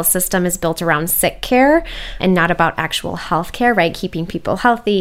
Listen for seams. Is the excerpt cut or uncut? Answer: uncut